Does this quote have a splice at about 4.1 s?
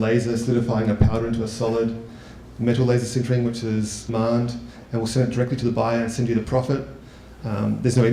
no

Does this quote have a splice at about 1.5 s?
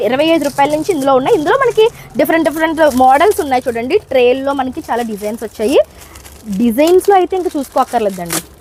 no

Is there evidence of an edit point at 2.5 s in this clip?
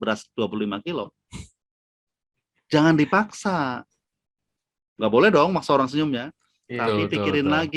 no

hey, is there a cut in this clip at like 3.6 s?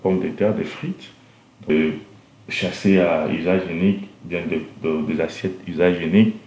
no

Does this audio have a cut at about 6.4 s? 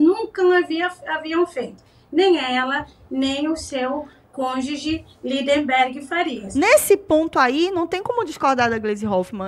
yes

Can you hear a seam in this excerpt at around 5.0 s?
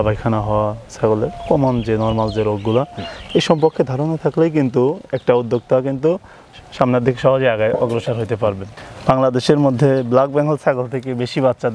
no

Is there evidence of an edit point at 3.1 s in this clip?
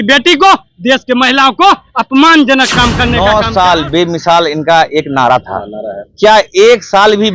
yes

